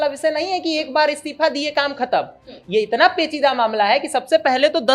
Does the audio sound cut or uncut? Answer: uncut